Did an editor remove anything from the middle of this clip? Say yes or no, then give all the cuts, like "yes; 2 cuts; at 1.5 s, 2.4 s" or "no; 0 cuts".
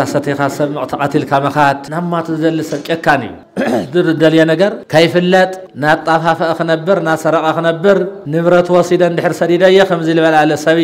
yes; 5 cuts; at 1.8 s, 3.4 s, 4.8 s, 5.7 s, 8.2 s